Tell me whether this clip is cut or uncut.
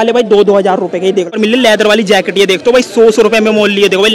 cut